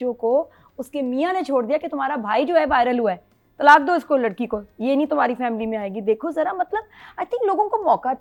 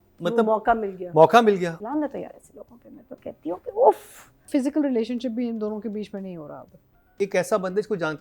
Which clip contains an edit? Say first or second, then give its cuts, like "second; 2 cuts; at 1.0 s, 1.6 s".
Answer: second; 3 cuts; at 1.7 s, 4.5 s, 7.1 s